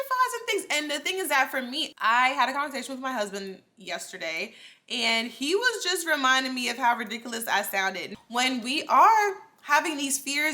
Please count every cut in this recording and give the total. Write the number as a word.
two